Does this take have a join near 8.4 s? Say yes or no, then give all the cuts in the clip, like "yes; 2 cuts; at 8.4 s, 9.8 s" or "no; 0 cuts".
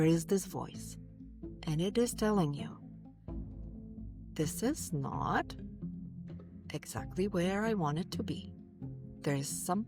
no; 0 cuts